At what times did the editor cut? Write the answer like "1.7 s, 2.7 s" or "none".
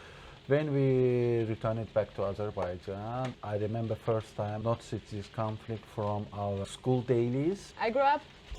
3.4 s, 4.6 s, 6.7 s, 7.7 s